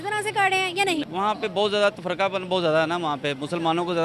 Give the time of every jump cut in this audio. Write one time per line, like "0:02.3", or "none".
0:01.1